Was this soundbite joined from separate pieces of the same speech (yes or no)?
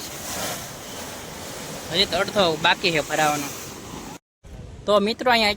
yes